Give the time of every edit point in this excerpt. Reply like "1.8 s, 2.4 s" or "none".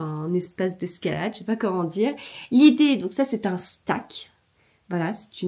none